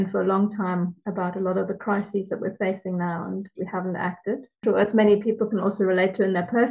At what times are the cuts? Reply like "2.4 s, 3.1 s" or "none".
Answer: 4.6 s